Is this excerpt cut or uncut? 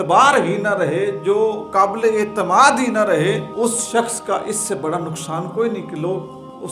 cut